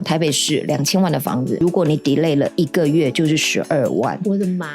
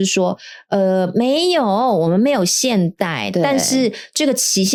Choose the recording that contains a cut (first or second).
first